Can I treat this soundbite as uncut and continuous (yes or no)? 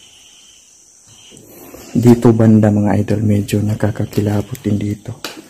no